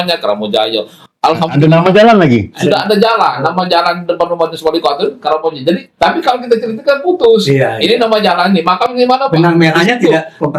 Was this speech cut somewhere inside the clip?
no; 0 cuts

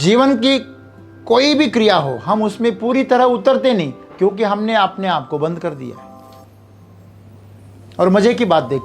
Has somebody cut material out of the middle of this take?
no; 0 cuts

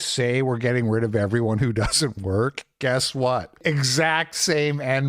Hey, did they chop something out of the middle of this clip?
yes; 1 cut; at 3.5 s

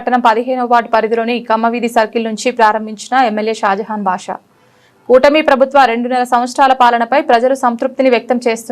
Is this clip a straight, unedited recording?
yes; 0 cuts

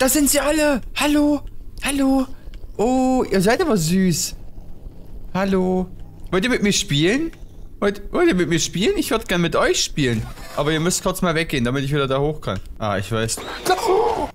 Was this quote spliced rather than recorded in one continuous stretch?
yes; 1 cut; at 12.7 s

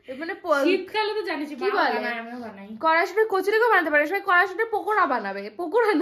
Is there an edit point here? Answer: no; 0 cuts

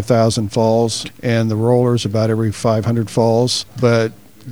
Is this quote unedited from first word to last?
no; 2 cuts; at 1.0 s, 3.6 s

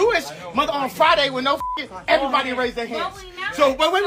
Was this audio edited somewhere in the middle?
no; 0 cuts

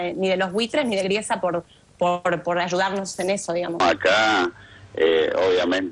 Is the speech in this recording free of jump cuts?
no; 1 cut; at 3.7 s

